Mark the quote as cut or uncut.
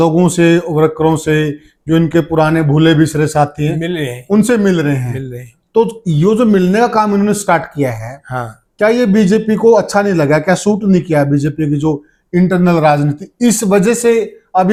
uncut